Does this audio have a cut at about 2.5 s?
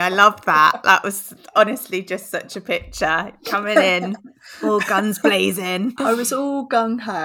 no; 1 cut; at 5.9 s

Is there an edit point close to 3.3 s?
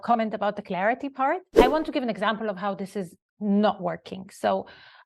no; 1 cut; at 1.5 s

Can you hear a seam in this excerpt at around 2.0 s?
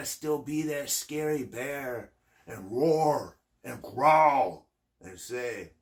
no; 0 cuts

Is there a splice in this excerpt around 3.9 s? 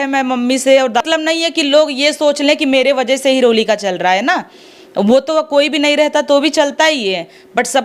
no; 1 cut; at 1.0 s

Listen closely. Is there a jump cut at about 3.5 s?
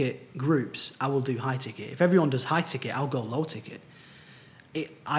no; 0 cuts

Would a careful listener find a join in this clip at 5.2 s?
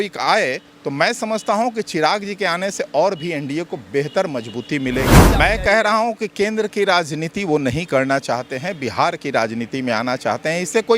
yes; 1 cut; at 5.2 s

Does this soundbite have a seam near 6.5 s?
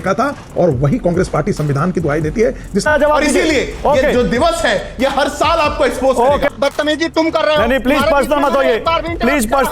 yes; 2 cuts; at 2.8 s, 6.5 s

